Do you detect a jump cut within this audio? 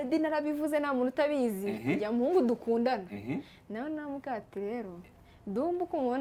no; 0 cuts

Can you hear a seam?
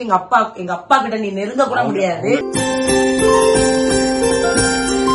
no; 0 cuts

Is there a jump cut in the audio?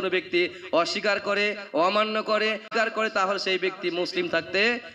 yes; 1 cut; at 2.7 s

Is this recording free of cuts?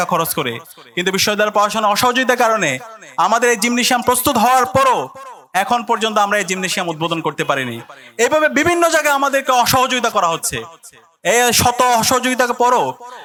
yes; 0 cuts

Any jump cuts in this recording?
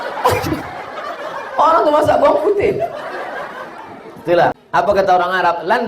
yes; 1 cut; at 4.6 s

